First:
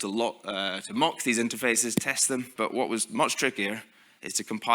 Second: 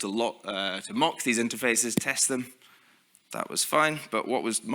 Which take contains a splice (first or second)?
first